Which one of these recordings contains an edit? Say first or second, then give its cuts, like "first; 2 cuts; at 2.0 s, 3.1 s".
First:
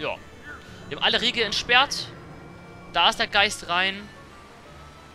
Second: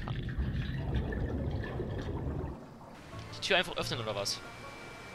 second; 1 cut; at 2.9 s